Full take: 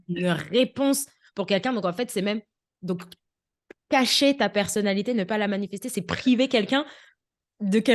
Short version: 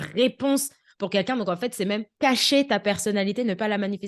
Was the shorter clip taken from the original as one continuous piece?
no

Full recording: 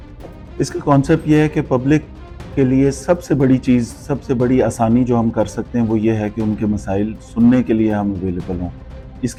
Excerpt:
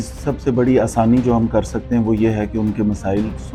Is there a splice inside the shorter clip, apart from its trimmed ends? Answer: no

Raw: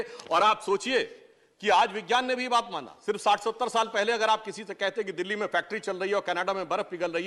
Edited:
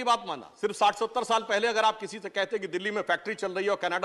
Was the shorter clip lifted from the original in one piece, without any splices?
yes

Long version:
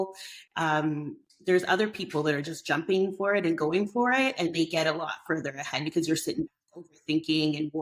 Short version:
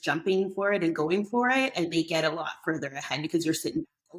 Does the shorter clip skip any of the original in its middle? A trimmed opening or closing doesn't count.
no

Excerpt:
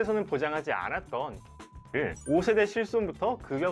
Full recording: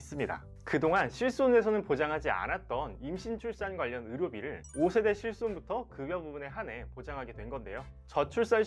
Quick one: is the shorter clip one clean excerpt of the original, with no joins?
no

